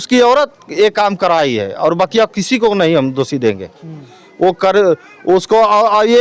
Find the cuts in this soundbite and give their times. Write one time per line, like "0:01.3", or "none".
none